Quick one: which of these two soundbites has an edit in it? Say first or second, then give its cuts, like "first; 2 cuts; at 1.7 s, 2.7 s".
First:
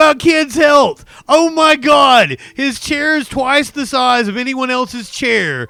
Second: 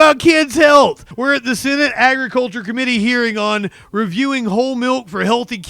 second; 1 cut; at 1.1 s